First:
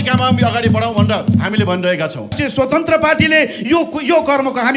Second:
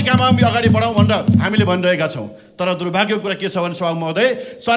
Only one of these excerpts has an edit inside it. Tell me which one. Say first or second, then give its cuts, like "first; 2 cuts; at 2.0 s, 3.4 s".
first; 1 cut; at 2.4 s